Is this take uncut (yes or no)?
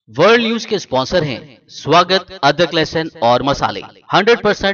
yes